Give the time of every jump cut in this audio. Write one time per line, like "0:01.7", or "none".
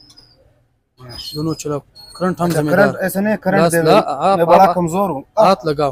none